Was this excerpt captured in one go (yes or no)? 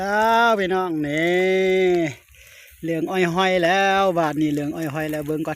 yes